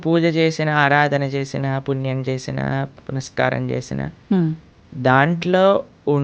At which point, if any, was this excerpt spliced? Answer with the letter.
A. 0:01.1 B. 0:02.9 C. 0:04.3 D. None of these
D